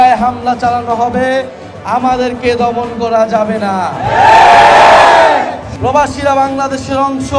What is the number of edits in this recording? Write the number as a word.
one